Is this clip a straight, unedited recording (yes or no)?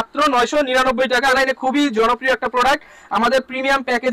no